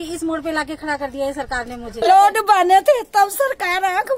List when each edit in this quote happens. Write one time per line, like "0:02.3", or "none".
0:02.0